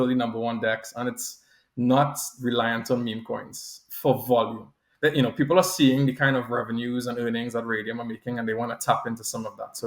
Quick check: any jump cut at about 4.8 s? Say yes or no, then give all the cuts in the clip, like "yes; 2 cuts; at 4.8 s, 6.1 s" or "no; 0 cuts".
yes; 1 cut; at 4.8 s